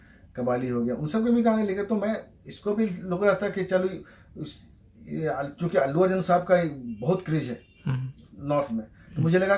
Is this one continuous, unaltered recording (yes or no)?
yes